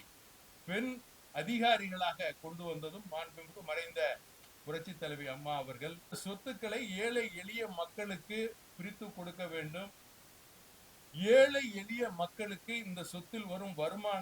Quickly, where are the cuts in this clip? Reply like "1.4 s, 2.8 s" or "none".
6.2 s